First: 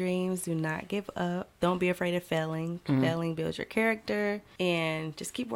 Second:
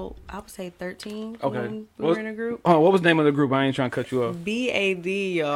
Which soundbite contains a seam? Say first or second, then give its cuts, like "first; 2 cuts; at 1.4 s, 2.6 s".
first; 2 cuts; at 1.5 s, 4.5 s